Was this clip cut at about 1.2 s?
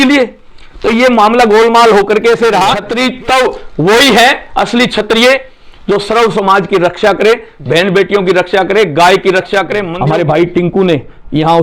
no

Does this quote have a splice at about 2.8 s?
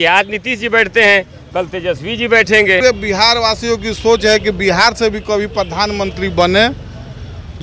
yes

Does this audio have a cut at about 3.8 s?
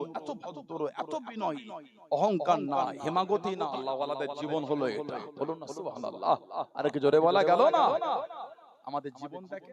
yes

